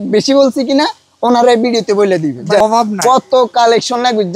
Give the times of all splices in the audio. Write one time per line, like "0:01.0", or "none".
0:02.6